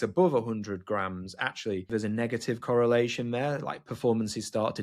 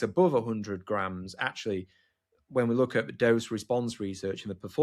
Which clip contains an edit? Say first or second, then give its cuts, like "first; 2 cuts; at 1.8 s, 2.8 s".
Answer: first; 1 cut; at 1.9 s